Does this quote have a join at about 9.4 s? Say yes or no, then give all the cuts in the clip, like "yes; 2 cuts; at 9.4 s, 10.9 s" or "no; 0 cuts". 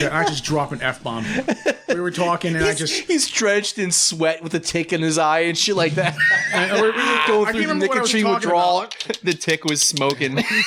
no; 0 cuts